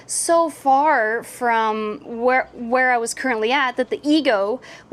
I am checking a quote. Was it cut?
no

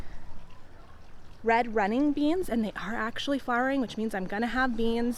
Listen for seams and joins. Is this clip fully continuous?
yes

